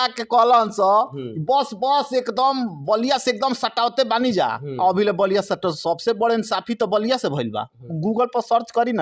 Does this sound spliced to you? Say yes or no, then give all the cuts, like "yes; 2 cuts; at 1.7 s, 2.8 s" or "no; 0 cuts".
yes; 1 cut; at 7.9 s